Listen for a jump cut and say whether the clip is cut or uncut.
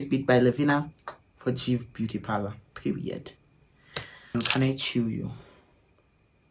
cut